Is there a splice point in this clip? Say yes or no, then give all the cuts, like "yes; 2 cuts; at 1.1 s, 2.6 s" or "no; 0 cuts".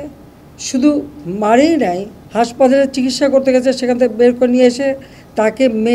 no; 0 cuts